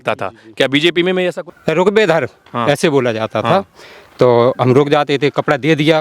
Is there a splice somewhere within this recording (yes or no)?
yes